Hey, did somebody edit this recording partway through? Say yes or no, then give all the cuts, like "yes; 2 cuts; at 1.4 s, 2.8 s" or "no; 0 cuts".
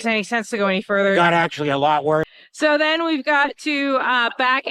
yes; 1 cut; at 2.4 s